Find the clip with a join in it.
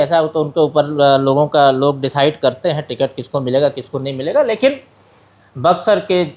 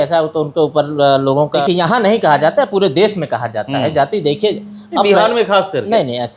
second; 1 cut; at 1.6 s

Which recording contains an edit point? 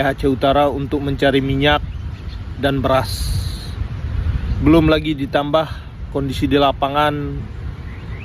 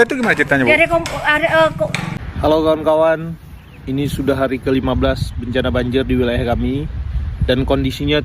second; 1 cut; at 2.1 s

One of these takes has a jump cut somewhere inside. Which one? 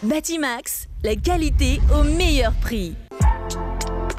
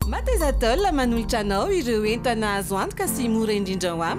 first; 1 cut; at 3.0 s

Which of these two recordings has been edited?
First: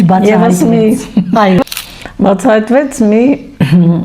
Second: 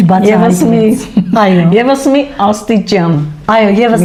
first; 1 cut; at 1.6 s

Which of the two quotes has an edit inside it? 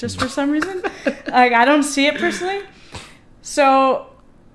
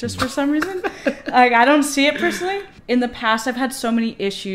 second; 1 cut; at 2.7 s

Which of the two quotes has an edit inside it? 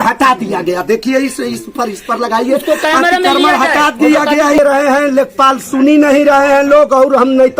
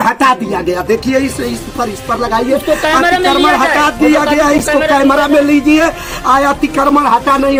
first; 1 cut; at 4.6 s

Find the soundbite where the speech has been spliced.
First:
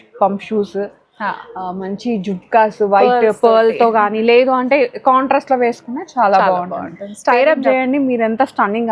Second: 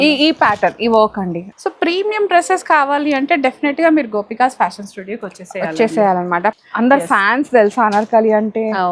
second; 2 cuts; at 1.4 s, 6.5 s

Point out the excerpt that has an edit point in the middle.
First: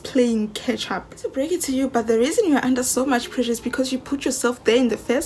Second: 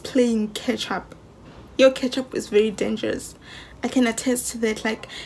first; 1 cut; at 1.3 s

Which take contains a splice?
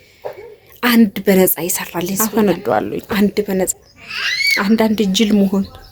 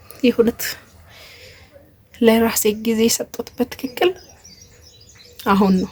first; 3 cuts; at 2.2 s, 3.1 s, 3.9 s

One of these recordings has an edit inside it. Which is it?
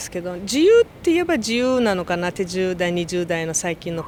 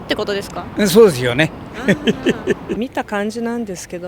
second; 1 cut; at 2.8 s

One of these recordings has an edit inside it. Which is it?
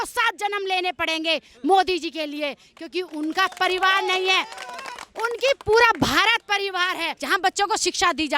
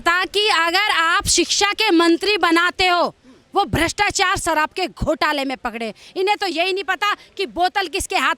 first; 1 cut; at 7.1 s

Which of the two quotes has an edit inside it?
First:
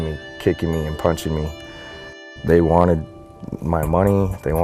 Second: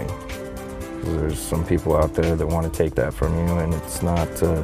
first; 1 cut; at 2.2 s

